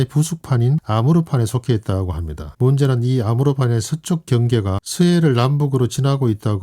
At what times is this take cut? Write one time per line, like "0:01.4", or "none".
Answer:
0:02.5